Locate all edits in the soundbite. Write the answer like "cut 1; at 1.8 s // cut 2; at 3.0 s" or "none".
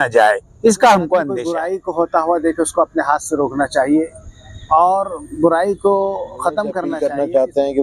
cut 1; at 1.5 s // cut 2; at 6.9 s

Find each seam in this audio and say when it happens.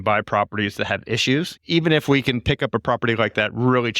cut 1; at 1.5 s

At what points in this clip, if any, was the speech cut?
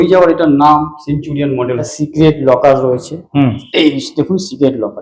cut 1; at 1.9 s // cut 2; at 3.6 s

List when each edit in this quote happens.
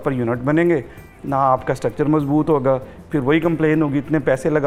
none

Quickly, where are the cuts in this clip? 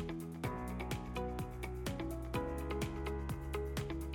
none

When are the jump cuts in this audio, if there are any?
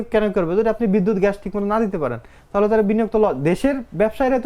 none

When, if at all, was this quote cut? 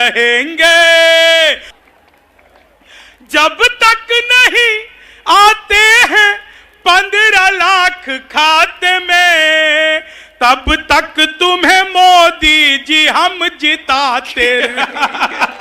cut 1; at 1.8 s

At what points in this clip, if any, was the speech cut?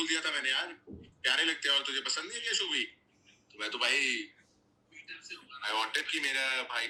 none

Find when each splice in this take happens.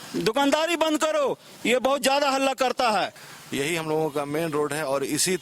cut 1; at 3.2 s

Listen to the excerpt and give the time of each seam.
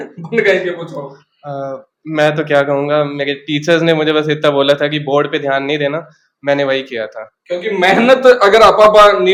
none

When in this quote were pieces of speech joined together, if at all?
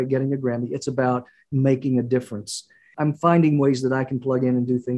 cut 1; at 2.9 s

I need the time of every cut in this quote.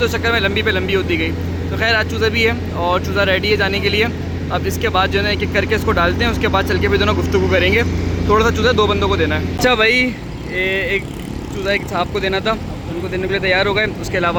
none

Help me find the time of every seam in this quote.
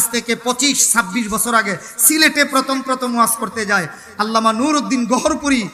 none

